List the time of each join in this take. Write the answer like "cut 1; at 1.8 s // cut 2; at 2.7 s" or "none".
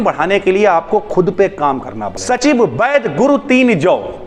cut 1; at 2.4 s